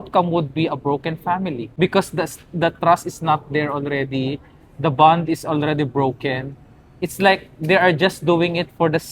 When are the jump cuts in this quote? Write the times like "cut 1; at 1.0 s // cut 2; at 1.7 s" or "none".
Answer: cut 1; at 1.6 s

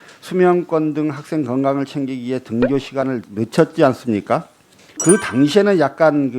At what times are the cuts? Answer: cut 1; at 3.3 s // cut 2; at 5.0 s

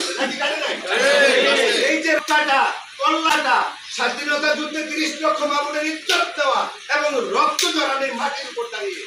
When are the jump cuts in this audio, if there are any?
cut 1; at 2.2 s // cut 2; at 3.3 s

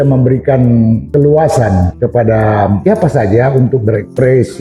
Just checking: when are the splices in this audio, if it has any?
cut 1; at 1.1 s // cut 2; at 1.9 s // cut 3; at 2.8 s

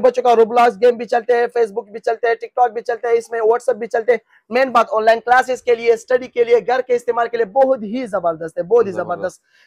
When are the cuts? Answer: none

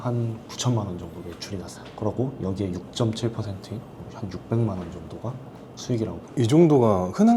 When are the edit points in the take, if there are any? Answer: none

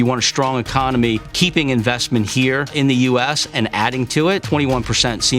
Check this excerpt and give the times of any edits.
cut 1; at 1.3 s // cut 2; at 2.7 s // cut 3; at 4.4 s

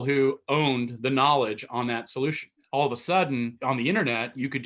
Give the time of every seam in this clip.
cut 1; at 2.5 s // cut 2; at 3.6 s

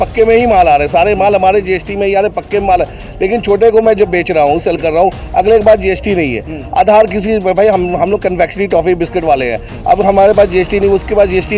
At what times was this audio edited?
none

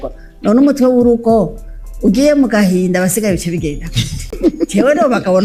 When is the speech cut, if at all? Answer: none

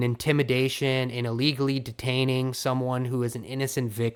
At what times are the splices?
none

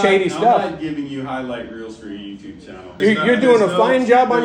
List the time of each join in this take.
cut 1; at 2.9 s

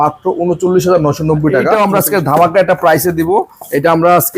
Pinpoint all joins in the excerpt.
cut 1; at 1.7 s

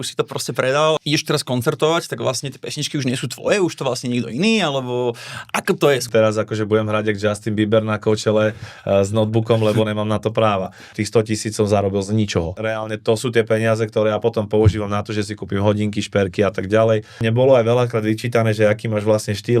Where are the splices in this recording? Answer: cut 1; at 1.0 s // cut 2; at 6.0 s // cut 3; at 10.9 s // cut 4; at 12.6 s // cut 5; at 17.2 s

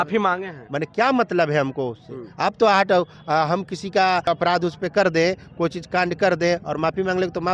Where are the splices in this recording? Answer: cut 1; at 4.2 s

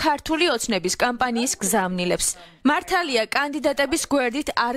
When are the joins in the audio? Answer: cut 1; at 2.4 s

